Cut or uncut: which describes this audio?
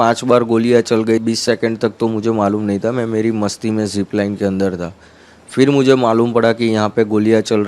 cut